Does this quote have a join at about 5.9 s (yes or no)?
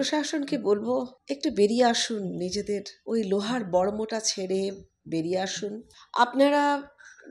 yes